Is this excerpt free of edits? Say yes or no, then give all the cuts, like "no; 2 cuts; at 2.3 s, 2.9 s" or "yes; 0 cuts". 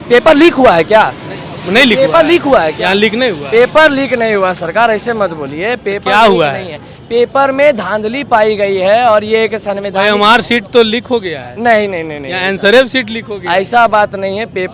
yes; 0 cuts